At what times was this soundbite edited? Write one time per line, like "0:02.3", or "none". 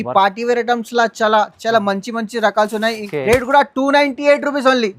0:03.0